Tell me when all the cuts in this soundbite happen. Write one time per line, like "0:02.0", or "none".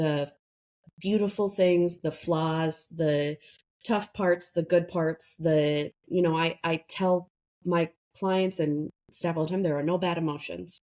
none